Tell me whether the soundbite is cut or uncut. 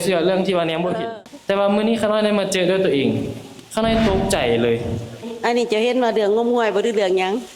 cut